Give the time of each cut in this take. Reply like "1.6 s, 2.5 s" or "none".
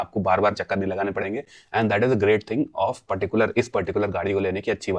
none